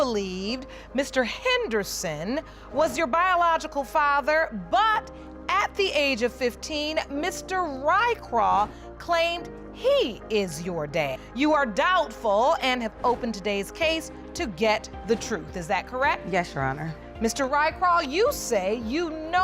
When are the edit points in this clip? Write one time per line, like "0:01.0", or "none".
none

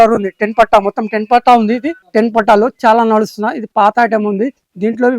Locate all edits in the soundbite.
0:01.9

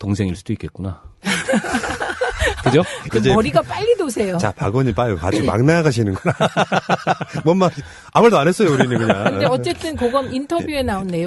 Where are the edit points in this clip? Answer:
0:01.0

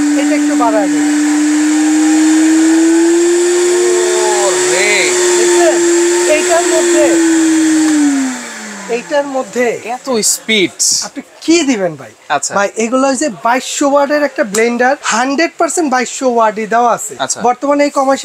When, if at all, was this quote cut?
0:15.1
0:17.2

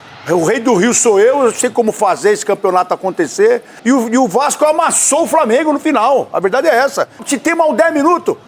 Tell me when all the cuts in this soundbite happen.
0:03.7
0:07.3

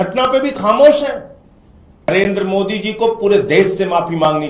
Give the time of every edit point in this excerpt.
0:02.1

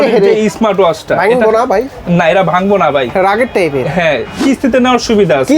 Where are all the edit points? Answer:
0:04.4

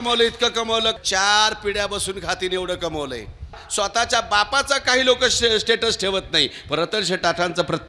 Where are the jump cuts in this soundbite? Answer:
0:01.0
0:03.6

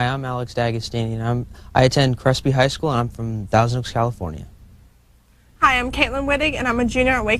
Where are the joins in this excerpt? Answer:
none

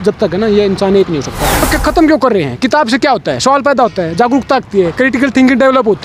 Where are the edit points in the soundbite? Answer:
0:01.6

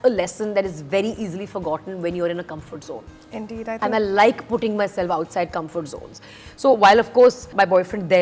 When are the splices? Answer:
none

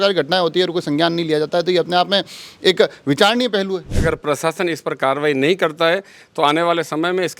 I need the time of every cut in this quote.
0:03.9

